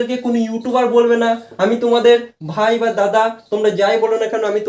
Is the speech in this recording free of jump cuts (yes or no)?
yes